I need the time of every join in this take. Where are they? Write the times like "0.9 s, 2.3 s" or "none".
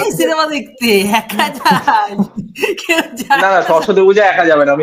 none